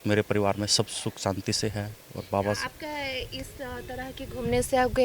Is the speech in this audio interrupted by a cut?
no; 0 cuts

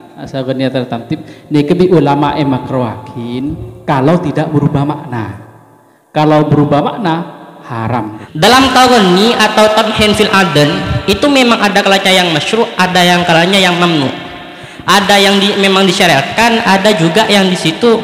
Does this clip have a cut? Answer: yes; 2 cuts; at 3.6 s, 8.2 s

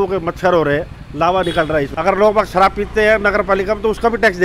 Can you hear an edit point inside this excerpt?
yes; 1 cut; at 1.9 s

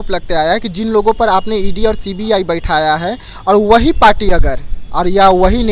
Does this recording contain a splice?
no; 0 cuts

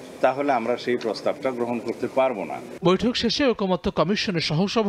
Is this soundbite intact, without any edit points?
yes; 0 cuts

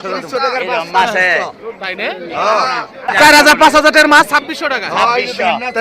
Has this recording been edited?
yes; 1 cut; at 3.1 s

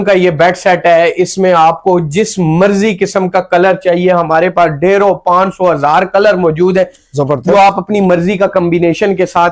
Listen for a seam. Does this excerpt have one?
no; 0 cuts

